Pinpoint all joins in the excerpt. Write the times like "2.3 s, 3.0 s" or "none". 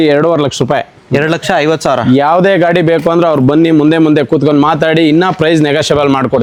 none